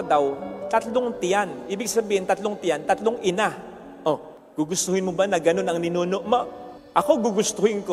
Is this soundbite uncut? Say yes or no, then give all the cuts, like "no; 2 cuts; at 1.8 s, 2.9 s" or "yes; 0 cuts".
yes; 0 cuts